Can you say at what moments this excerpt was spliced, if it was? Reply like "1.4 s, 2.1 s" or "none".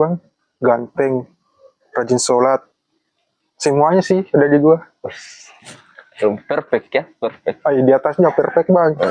none